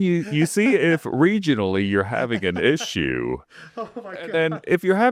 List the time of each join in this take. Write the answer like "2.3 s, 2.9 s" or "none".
none